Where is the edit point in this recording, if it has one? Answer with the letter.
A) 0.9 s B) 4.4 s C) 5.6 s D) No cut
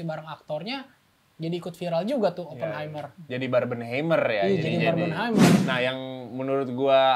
C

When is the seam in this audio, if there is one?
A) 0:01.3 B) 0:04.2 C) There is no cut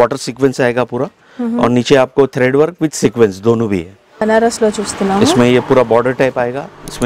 B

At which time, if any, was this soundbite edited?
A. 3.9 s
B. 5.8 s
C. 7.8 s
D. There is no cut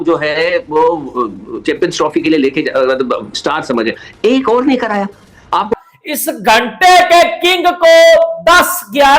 B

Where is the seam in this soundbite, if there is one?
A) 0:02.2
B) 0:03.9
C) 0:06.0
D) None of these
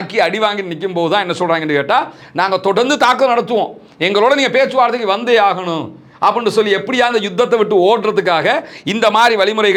D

